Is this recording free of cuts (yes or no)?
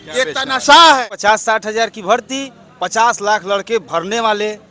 no